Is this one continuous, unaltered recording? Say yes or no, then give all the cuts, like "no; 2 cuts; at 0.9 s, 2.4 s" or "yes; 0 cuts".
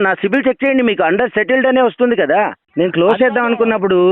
no; 1 cut; at 2.6 s